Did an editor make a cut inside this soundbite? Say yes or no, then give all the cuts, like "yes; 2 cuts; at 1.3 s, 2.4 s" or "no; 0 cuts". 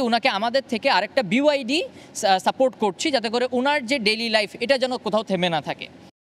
no; 0 cuts